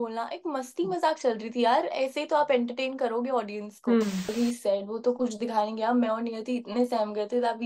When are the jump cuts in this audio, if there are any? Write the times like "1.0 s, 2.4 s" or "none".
4.3 s